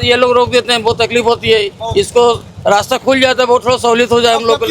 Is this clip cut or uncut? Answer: uncut